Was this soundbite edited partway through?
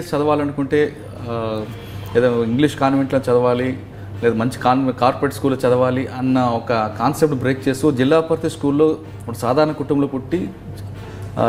no; 0 cuts

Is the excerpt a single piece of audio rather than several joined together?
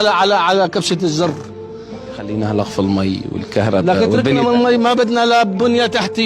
yes; 0 cuts

